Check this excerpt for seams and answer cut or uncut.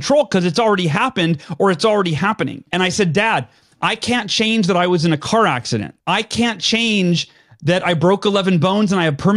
cut